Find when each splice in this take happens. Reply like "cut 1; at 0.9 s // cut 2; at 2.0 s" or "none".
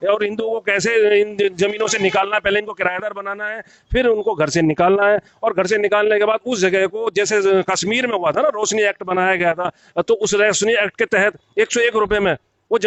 none